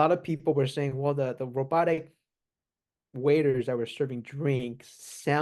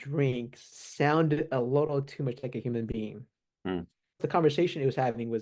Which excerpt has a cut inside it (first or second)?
second